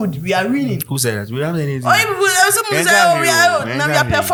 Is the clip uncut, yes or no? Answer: yes